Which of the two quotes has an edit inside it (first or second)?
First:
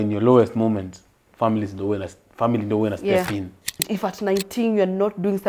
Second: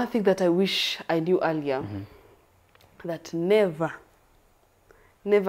first